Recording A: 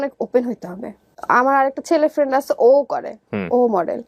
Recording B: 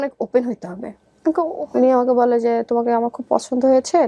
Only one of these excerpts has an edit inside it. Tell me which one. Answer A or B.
B